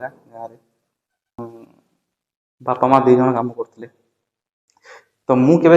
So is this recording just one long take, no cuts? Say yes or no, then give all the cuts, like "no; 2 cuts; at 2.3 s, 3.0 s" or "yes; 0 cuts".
no; 1 cut; at 1.4 s